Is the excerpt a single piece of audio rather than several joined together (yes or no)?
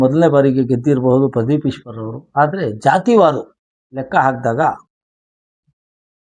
yes